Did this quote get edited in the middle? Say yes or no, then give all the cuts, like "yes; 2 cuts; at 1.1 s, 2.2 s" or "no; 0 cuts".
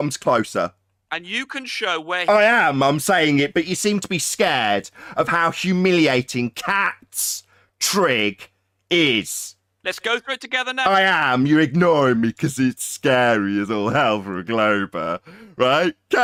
no; 0 cuts